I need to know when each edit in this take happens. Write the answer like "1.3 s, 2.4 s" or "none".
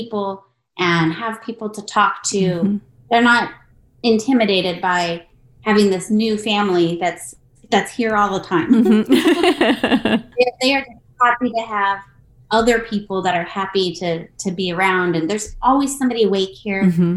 10.3 s

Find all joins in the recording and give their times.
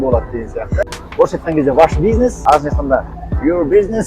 1.0 s, 2.4 s

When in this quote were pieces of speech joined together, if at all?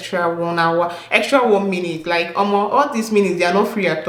none

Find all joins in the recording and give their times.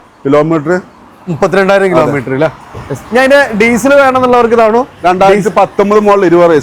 none

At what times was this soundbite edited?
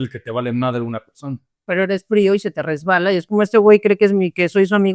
1.7 s

